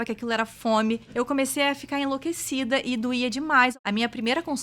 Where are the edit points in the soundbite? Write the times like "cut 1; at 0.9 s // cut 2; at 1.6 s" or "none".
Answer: cut 1; at 1.1 s // cut 2; at 3.7 s